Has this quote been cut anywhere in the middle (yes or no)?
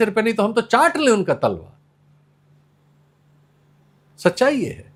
no